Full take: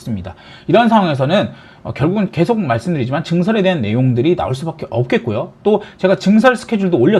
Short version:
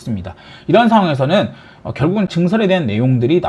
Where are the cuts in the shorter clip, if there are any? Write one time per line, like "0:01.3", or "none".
0:02.3